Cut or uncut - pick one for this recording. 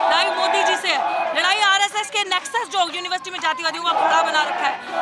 uncut